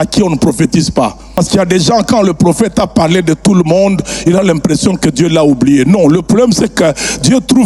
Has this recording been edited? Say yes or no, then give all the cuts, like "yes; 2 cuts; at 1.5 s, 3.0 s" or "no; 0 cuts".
yes; 1 cut; at 1.2 s